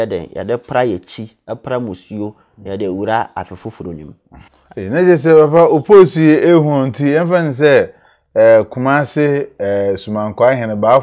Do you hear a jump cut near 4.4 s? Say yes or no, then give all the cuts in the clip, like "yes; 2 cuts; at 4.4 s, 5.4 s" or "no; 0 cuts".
yes; 1 cut; at 4.4 s